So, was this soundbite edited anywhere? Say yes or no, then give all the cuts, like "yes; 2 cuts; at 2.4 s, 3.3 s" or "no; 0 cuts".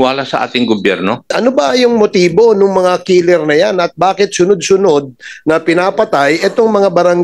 yes; 1 cut; at 1.3 s